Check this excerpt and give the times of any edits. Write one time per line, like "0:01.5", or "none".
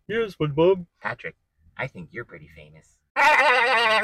0:00.9